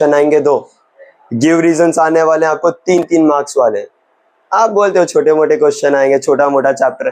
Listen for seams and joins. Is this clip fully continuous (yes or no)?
yes